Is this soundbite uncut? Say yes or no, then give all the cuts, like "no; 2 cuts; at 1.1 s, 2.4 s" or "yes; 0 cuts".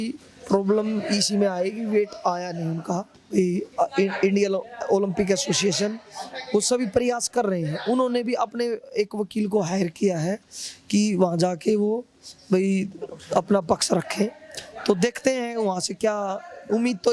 no; 1 cut; at 3.2 s